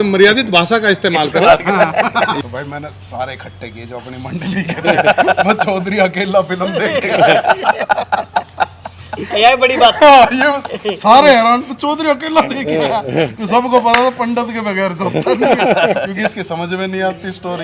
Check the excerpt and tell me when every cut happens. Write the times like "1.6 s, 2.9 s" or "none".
2.4 s